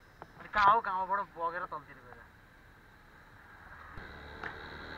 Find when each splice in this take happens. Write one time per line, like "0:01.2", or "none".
0:03.9